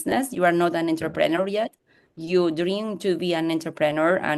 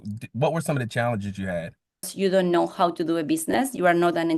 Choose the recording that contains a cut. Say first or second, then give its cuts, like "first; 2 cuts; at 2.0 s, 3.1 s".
second; 1 cut; at 2.1 s